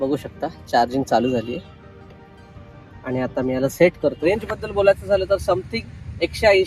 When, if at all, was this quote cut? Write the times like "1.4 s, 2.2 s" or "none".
4.2 s